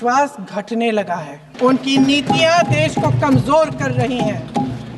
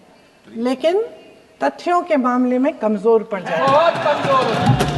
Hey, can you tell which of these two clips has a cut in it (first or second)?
first